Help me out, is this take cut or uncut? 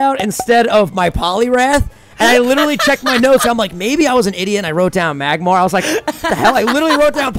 uncut